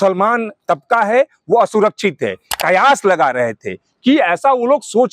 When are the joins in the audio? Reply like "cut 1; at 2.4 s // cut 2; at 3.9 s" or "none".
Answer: cut 1; at 2.5 s